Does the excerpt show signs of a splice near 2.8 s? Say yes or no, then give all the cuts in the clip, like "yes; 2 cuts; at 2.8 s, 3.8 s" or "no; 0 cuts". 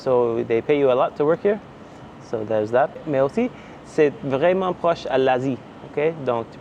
no; 0 cuts